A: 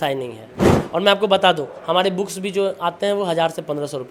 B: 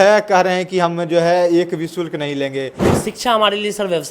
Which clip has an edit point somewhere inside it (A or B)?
B